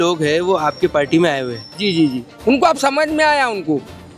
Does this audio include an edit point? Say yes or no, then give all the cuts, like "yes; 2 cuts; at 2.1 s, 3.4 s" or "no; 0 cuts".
yes; 1 cut; at 2.3 s